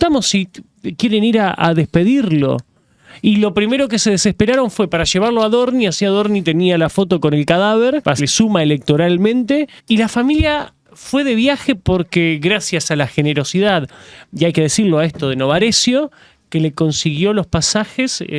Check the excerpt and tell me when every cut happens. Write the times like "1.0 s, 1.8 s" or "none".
8.2 s, 9.8 s